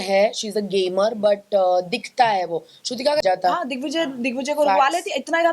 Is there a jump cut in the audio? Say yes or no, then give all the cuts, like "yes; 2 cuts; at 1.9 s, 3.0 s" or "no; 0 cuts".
yes; 1 cut; at 3.2 s